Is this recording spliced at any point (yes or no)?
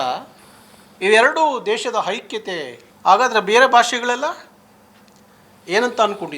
yes